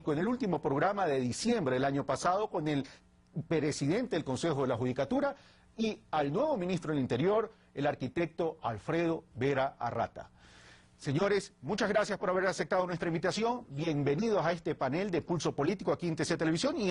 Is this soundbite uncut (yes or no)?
no